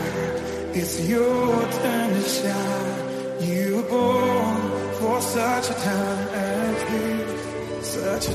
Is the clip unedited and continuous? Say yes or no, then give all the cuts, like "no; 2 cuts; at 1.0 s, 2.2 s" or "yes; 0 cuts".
yes; 0 cuts